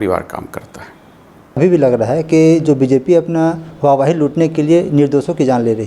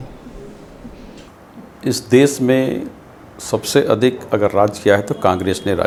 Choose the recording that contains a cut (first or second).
first